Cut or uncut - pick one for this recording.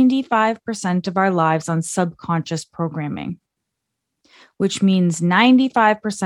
uncut